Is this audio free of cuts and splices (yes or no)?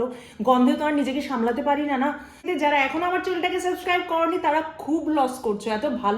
no